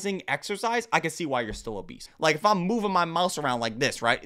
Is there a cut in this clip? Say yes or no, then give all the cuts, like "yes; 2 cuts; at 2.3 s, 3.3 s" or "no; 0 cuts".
yes; 1 cut; at 2.0 s